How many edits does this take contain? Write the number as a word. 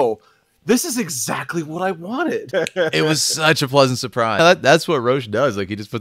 two